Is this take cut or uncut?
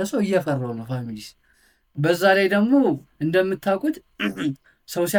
uncut